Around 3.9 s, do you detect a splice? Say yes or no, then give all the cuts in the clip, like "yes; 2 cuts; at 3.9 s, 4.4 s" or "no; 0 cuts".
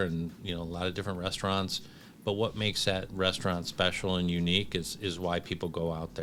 no; 0 cuts